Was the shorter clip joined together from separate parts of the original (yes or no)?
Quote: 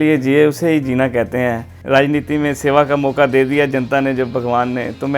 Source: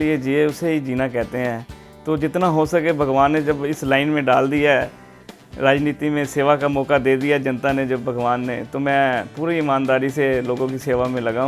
yes